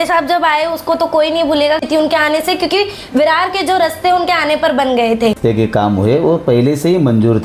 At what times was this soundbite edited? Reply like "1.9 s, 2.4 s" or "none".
1.8 s, 5.4 s